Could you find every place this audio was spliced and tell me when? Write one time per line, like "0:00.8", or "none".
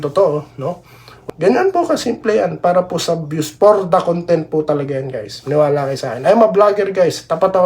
0:01.1